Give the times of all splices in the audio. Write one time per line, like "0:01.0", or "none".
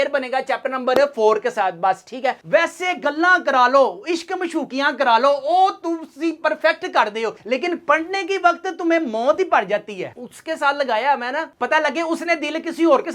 0:02.4
0:10.2